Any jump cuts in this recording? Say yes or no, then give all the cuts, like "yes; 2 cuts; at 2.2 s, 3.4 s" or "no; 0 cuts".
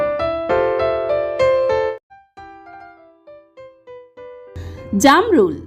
no; 0 cuts